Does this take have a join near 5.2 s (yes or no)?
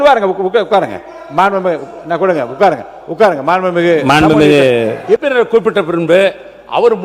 yes